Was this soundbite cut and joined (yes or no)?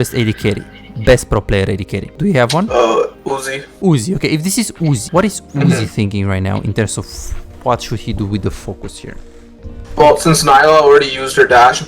yes